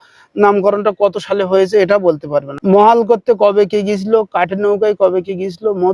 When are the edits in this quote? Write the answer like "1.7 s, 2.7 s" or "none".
2.5 s